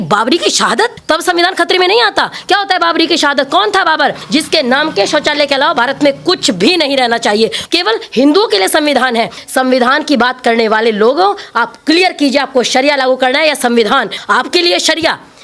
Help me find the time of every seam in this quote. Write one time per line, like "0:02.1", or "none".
0:01.0
0:04.2
0:07.6
0:09.4
0:14.2